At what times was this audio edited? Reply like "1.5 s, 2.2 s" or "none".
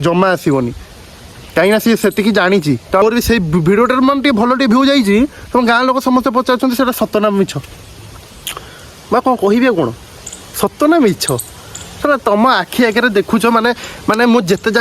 3.0 s